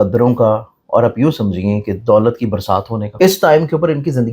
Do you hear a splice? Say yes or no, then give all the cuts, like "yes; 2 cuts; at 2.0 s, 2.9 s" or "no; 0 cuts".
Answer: yes; 1 cut; at 3.0 s